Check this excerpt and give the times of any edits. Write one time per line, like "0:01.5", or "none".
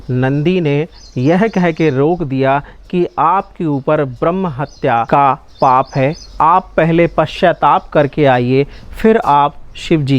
0:05.1